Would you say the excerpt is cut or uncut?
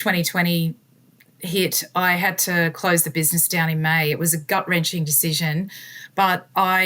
uncut